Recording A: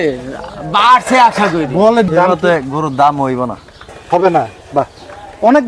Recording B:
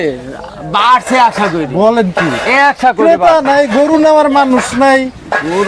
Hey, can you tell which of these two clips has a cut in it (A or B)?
A